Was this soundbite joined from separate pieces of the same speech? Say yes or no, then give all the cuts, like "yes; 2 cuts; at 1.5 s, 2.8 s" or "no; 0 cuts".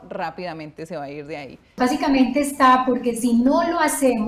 yes; 1 cut; at 1.8 s